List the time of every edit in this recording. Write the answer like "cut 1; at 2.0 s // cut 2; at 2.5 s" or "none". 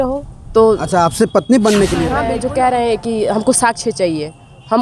cut 1; at 2.3 s